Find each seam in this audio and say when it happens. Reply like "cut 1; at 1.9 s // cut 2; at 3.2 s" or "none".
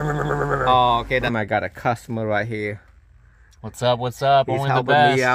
cut 1; at 1.3 s